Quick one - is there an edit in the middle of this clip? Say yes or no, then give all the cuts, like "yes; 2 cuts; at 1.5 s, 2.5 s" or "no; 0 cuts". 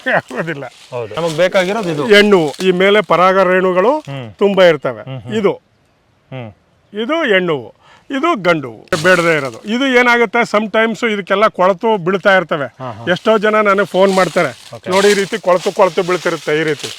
yes; 2 cuts; at 1.2 s, 9.0 s